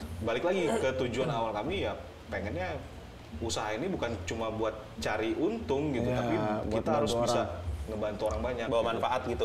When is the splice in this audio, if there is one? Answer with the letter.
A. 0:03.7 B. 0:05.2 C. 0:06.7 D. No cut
D